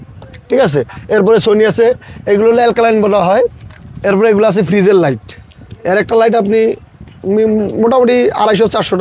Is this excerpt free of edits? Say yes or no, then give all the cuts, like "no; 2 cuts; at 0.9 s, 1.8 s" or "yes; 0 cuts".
yes; 0 cuts